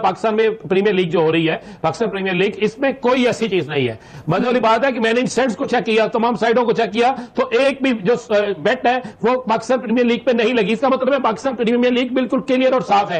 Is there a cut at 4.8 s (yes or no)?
no